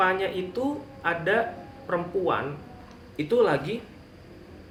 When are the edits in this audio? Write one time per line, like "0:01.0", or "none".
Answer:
none